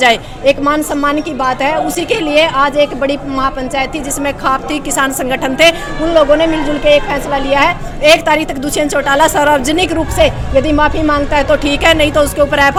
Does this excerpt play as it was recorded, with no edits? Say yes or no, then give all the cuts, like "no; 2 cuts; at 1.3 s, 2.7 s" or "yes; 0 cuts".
yes; 0 cuts